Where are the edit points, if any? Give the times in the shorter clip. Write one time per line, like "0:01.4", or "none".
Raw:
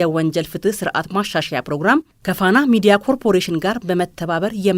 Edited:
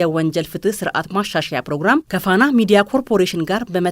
0:02.1